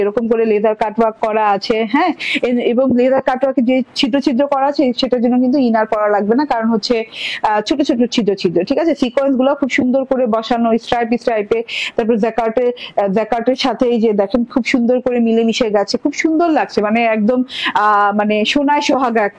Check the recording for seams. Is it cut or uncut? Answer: uncut